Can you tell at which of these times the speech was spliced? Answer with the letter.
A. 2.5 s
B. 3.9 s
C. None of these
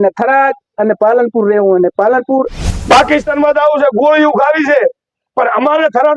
A